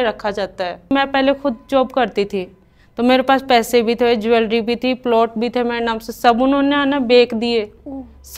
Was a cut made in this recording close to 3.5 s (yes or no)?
no